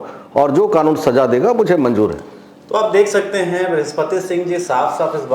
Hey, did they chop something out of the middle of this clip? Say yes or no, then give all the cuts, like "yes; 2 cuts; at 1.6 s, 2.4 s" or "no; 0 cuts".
no; 0 cuts